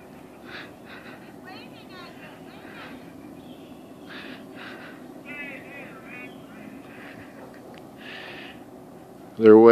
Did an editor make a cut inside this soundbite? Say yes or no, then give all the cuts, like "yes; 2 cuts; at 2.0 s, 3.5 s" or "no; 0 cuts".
yes; 1 cut; at 2.7 s